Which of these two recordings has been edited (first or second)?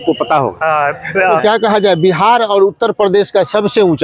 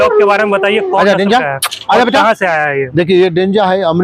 first